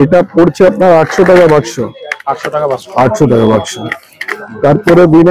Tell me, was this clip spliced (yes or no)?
no